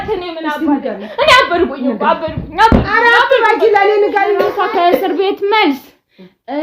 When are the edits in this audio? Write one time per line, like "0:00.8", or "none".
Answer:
0:04.5